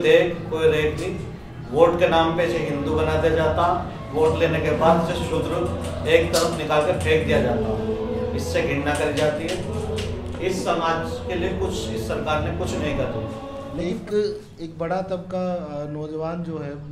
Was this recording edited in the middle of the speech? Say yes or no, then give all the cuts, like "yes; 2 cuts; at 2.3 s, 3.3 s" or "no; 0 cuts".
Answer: no; 0 cuts